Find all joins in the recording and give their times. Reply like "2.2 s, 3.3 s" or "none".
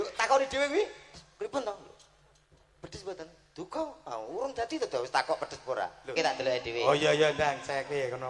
1.1 s, 6.1 s